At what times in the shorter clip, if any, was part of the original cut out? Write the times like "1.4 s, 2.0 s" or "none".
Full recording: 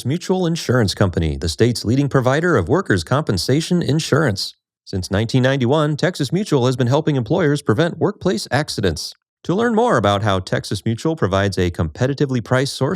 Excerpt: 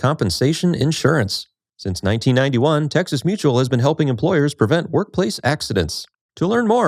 none